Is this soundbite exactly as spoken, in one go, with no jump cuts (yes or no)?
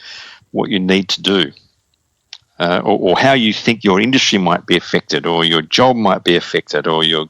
no